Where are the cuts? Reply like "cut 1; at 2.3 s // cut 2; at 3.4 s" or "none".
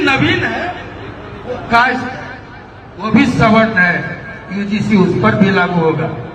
none